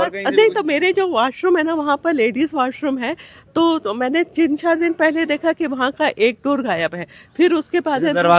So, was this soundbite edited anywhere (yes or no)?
no